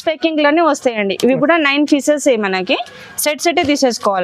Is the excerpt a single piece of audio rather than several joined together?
yes; 0 cuts

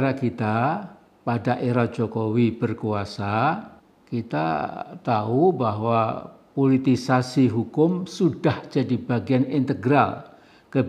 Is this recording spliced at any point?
no; 0 cuts

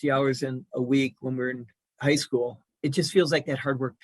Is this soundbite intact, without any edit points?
no; 1 cut; at 2.6 s

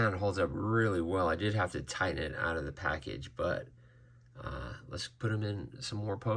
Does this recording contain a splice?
no; 0 cuts

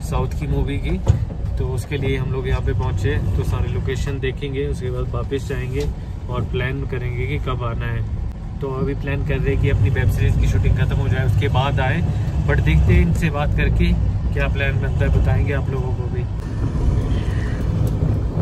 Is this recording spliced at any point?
no; 0 cuts

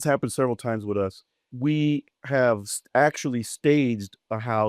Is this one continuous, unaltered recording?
no; 1 cut; at 1.4 s

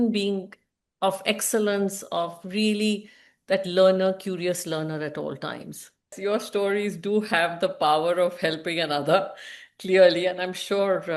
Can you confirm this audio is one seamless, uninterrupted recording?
no; 1 cut; at 6.1 s

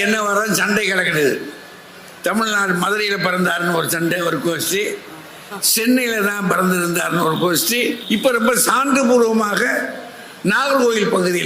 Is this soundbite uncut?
no; 1 cut; at 8.0 s

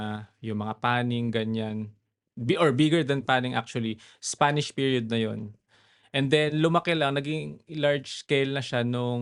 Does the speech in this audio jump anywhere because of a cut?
no; 0 cuts

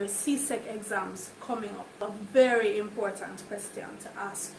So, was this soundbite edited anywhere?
yes; 1 cut; at 2.0 s

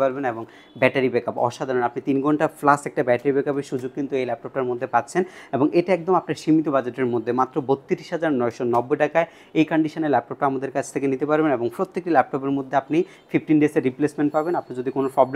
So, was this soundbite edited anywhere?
no; 0 cuts

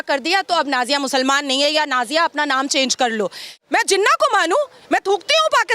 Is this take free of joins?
no; 1 cut; at 3.6 s

